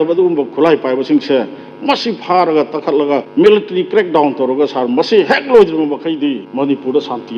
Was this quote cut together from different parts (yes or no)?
yes